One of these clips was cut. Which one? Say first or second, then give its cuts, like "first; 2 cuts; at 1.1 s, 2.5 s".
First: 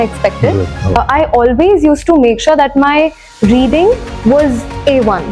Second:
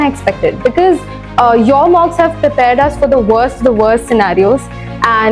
first; 1 cut; at 1.0 s